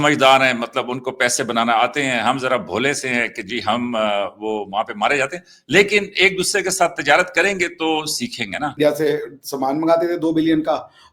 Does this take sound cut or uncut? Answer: cut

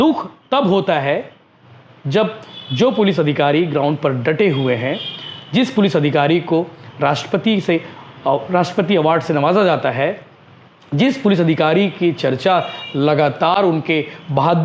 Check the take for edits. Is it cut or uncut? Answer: uncut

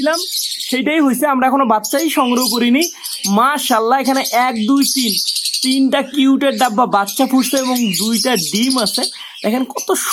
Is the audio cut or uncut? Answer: uncut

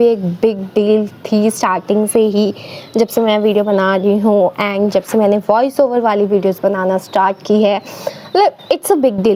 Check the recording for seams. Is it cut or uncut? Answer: uncut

